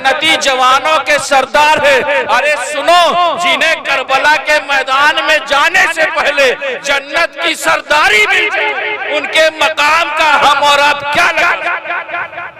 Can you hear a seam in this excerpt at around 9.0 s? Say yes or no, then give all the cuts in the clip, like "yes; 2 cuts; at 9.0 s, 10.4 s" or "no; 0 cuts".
no; 1 cut; at 10.4 s